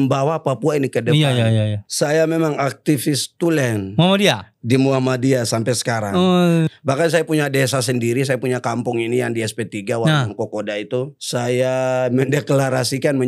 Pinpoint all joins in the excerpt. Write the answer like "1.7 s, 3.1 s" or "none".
1.8 s, 6.7 s, 11.2 s